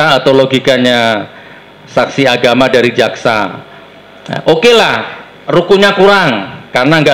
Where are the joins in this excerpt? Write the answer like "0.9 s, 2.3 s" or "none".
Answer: none